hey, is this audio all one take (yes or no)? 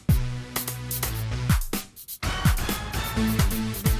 no